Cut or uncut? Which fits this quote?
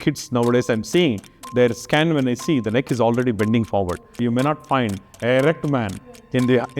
cut